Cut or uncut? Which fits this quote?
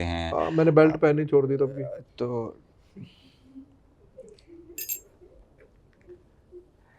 uncut